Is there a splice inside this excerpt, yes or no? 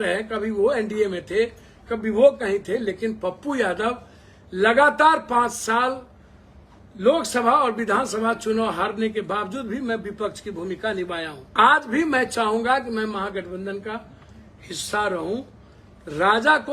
yes